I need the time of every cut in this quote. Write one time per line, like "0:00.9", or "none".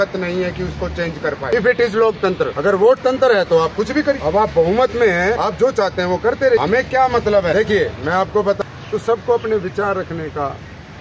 0:01.5
0:02.5
0:04.2
0:05.4
0:06.6
0:07.5
0:08.6